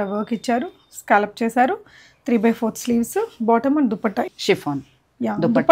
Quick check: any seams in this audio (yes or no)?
yes